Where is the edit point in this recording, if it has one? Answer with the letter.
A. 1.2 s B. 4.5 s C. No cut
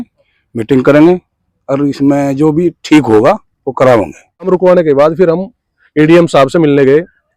B